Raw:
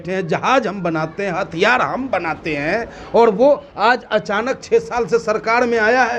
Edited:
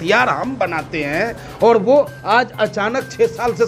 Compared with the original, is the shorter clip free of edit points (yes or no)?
yes